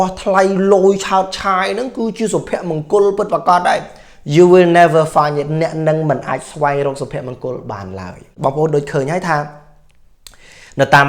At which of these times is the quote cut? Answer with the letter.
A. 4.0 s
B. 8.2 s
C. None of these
B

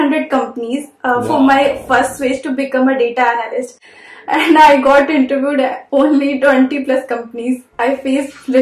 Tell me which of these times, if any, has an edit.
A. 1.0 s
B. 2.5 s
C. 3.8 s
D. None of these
D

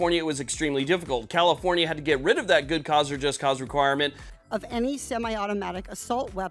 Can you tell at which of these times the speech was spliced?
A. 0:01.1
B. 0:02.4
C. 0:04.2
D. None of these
C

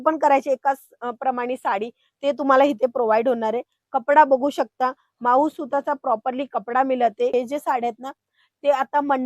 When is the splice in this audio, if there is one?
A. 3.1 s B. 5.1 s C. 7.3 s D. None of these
C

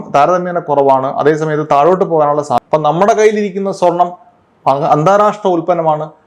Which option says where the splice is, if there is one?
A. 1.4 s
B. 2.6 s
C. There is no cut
B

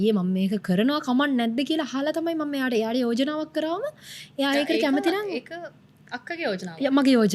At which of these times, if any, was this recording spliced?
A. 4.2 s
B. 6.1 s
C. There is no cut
C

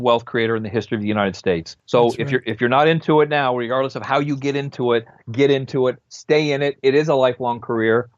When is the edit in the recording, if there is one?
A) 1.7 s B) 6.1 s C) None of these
A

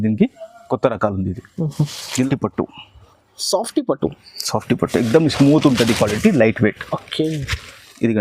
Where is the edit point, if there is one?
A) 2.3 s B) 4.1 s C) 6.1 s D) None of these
A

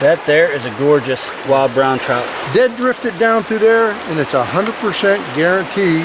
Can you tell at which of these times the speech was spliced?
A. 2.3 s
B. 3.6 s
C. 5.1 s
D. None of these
A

